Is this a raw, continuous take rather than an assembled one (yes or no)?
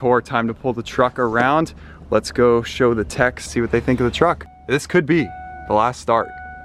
yes